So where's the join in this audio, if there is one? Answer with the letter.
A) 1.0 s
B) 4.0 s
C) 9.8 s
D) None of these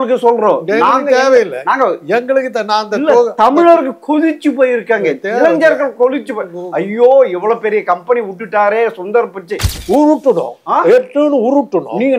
C